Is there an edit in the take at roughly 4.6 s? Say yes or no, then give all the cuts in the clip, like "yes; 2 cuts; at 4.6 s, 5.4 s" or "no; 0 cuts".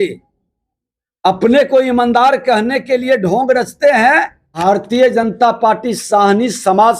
yes; 1 cut; at 4.6 s